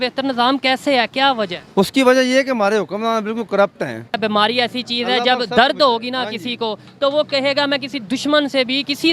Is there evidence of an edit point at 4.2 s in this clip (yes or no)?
yes